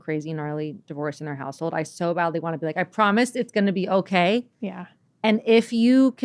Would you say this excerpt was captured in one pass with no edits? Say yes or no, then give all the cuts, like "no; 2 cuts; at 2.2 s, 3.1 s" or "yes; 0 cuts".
yes; 0 cuts